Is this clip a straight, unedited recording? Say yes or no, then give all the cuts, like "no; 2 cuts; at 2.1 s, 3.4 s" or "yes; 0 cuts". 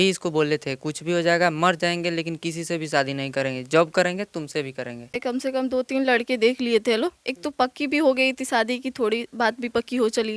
no; 1 cut; at 5.2 s